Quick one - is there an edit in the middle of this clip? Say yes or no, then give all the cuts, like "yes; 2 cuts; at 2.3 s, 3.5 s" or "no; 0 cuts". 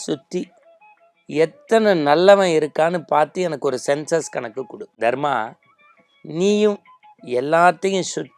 yes; 1 cut; at 4.8 s